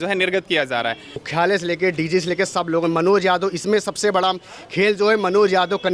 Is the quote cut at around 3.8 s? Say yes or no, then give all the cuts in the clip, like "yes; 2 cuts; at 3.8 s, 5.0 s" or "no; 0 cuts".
no; 1 cut; at 1.3 s